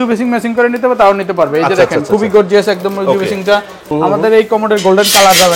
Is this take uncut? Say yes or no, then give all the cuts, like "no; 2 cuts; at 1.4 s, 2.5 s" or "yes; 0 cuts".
no; 1 cut; at 3.8 s